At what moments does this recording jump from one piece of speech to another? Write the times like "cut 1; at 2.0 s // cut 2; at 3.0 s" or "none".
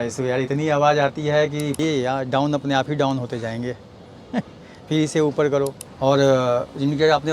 cut 1; at 1.8 s // cut 2; at 5.8 s